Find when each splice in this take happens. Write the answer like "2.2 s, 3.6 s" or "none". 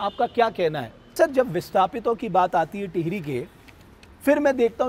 1.1 s